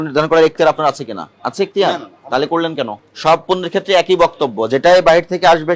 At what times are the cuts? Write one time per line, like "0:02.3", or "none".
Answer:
0:01.2
0:03.0

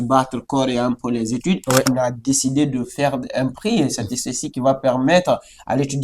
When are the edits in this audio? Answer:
0:01.9

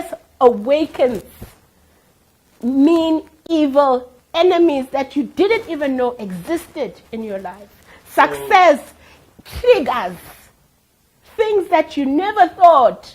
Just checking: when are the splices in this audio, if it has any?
none

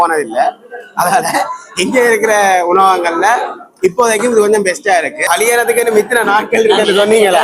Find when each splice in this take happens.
0:05.2

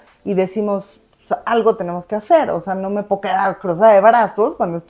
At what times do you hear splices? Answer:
none

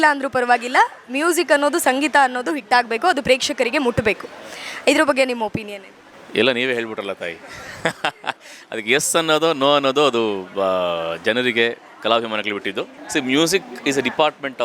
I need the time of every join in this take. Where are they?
0:13.0

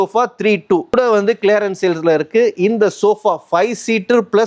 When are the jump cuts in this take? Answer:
0:01.0

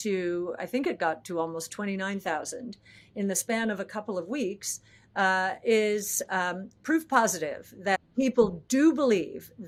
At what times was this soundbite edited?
none

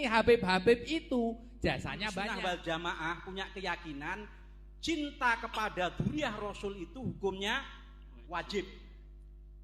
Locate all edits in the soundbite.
0:01.9

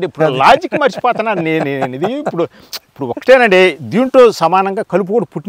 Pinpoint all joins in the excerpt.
none

